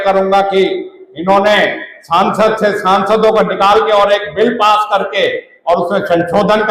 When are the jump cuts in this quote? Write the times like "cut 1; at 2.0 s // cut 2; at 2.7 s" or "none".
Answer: none